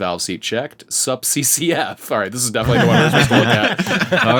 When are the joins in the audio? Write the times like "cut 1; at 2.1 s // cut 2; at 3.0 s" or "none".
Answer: none